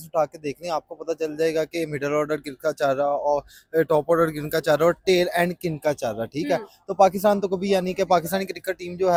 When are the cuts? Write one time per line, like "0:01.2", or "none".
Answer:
none